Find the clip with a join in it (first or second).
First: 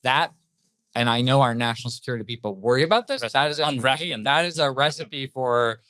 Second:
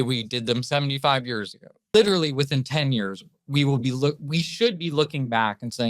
second